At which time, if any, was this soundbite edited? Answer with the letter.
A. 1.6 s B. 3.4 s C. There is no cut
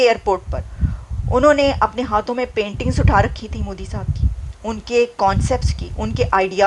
C